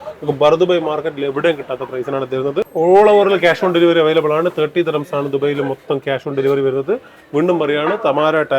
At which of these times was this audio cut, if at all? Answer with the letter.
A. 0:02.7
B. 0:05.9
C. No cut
A